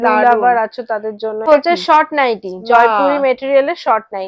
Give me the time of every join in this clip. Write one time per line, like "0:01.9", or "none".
0:01.5